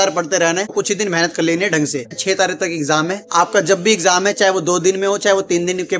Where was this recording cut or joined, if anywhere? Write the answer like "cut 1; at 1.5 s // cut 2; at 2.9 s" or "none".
cut 1; at 2.2 s